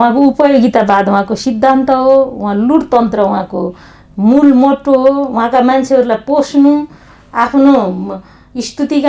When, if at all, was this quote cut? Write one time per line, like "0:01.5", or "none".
none